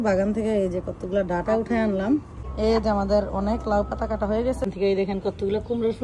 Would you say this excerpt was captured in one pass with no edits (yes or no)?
no